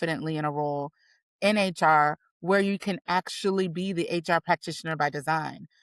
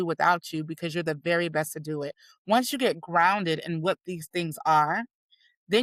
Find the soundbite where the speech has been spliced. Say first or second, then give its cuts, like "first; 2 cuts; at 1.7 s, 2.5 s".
first; 1 cut; at 4.4 s